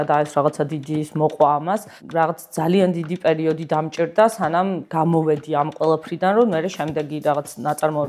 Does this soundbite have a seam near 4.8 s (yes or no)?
yes